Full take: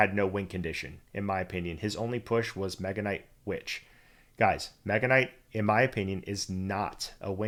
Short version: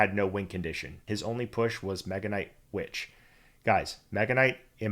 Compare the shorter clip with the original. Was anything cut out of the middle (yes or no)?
yes